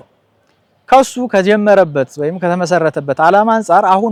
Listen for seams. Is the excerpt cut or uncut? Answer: uncut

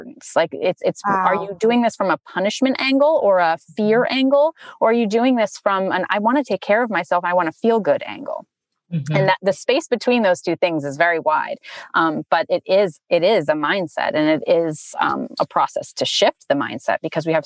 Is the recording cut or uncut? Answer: uncut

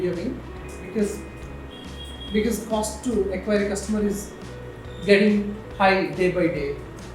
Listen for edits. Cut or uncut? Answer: uncut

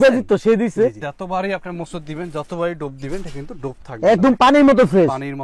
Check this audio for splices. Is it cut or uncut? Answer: cut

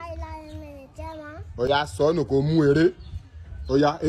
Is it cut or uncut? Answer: uncut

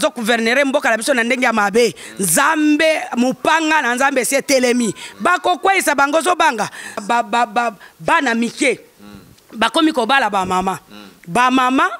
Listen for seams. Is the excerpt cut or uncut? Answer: cut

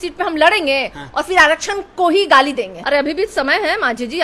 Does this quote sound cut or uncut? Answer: cut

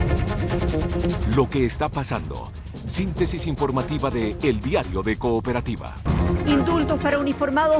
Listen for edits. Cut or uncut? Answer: uncut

